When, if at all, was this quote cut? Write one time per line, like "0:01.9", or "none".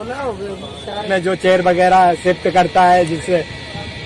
0:01.0